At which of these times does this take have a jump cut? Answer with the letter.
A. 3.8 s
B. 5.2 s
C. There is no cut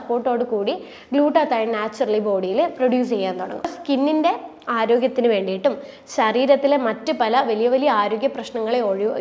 A